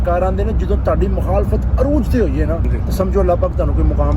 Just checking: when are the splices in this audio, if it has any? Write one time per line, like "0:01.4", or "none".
0:02.7